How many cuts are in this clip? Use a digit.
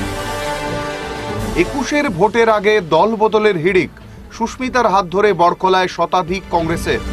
1